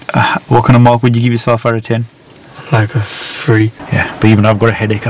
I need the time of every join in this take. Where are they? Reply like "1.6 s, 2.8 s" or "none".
3.8 s